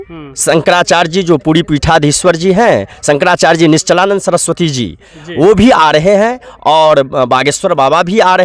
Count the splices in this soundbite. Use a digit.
0